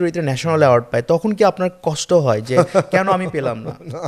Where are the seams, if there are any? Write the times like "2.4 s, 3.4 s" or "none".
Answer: none